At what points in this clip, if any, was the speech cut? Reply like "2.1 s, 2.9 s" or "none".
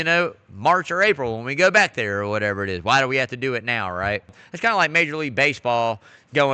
4.4 s